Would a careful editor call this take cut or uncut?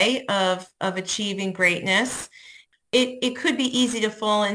cut